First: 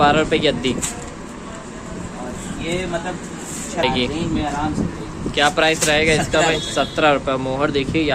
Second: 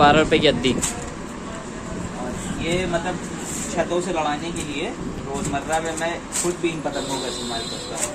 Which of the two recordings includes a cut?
first; 1 cut; at 3.8 s

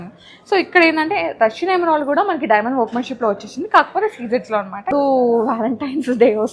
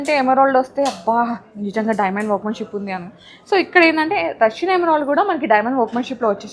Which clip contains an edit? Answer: first; 1 cut; at 4.9 s

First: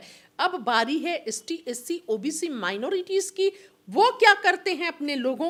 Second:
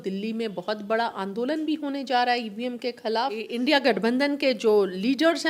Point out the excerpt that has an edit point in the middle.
second; 1 cut; at 3.5 s

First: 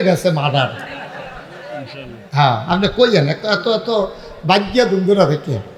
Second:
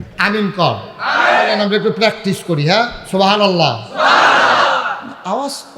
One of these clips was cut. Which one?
second; 1 cut; at 1.5 s

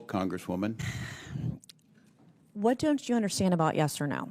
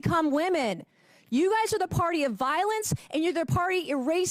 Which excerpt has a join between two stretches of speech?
first; 1 cut; at 0.9 s

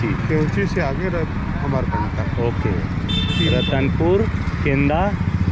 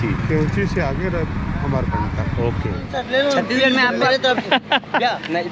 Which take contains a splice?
second; 1 cut; at 2.9 s

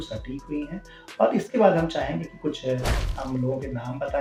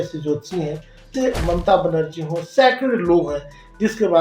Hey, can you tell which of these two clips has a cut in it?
second; 1 cut; at 1.1 s

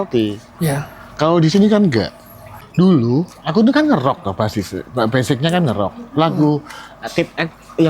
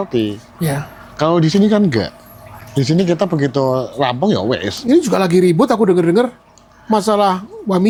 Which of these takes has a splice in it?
first; 1 cut; at 2.6 s

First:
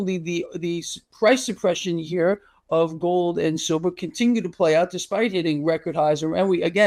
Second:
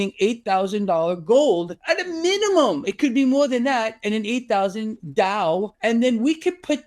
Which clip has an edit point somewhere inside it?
second; 2 cuts; at 1.7 s, 5.7 s

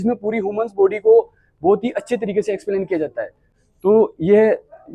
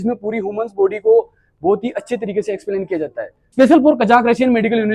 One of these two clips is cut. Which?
second; 1 cut; at 3.5 s

